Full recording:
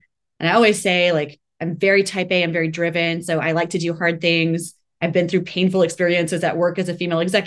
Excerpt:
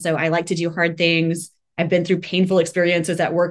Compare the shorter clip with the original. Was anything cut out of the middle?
no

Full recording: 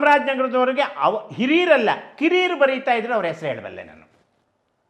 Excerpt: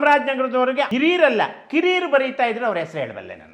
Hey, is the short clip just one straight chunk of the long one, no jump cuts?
no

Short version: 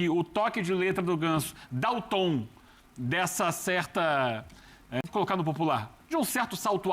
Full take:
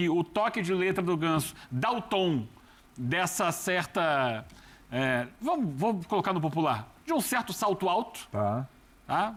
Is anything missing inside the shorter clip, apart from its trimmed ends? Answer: yes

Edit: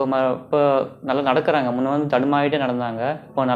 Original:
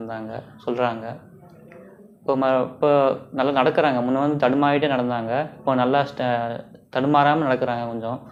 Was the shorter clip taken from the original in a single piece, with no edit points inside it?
yes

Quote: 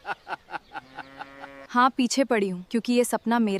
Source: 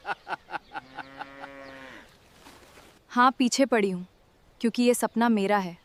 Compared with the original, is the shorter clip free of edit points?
no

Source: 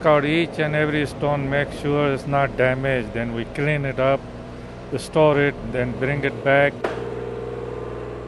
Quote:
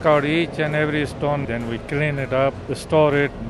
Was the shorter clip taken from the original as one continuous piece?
no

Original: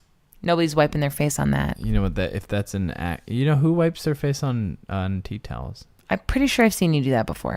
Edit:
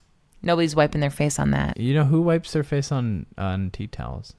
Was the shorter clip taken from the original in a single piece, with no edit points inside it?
no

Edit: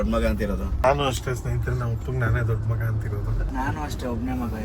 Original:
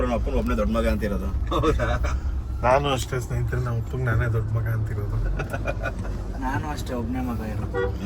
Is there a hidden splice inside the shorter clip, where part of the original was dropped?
yes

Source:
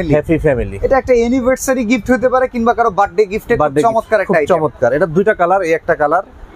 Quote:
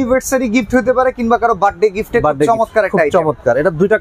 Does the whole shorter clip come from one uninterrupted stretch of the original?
yes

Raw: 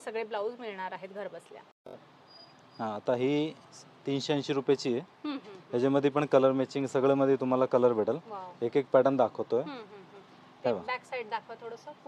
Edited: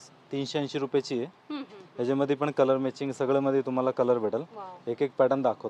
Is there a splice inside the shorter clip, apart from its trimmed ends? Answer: no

